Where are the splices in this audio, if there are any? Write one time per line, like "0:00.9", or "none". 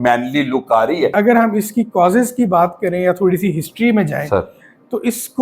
0:01.1